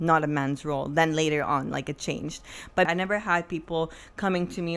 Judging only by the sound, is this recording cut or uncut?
cut